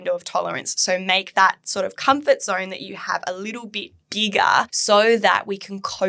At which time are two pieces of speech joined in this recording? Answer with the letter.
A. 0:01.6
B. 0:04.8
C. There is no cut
B